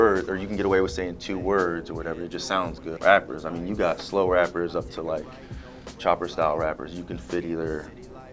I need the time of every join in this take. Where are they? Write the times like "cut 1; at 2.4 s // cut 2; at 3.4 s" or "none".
cut 1; at 2.9 s